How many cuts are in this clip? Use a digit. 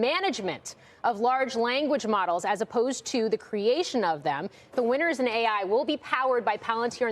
1